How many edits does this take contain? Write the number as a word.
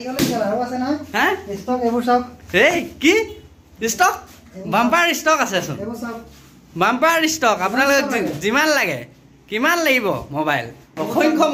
zero